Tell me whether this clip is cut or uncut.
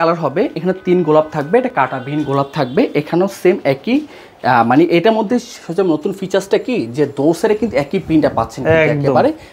uncut